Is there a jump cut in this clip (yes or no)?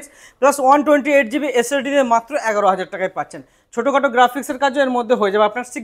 no